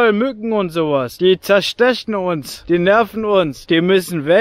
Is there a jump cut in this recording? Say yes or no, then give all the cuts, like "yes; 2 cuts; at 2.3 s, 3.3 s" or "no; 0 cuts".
yes; 3 cuts; at 1.1 s, 2.5 s, 3.6 s